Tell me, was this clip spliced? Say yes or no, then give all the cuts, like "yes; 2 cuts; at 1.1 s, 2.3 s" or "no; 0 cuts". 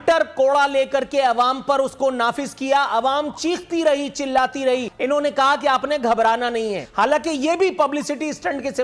yes; 2 cuts; at 4.9 s, 6.8 s